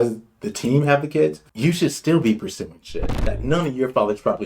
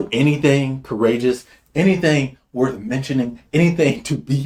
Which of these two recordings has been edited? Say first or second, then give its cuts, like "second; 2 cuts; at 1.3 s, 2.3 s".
first; 1 cut; at 3.2 s